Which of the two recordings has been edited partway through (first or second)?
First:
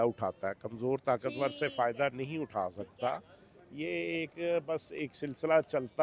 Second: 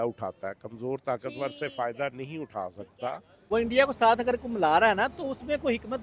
second